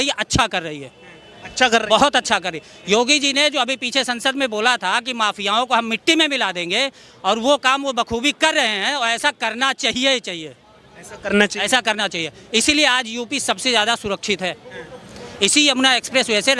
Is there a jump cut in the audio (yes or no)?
no